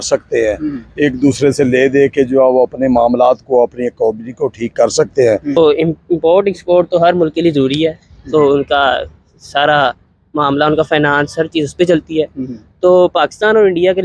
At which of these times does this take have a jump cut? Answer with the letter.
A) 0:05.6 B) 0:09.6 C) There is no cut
A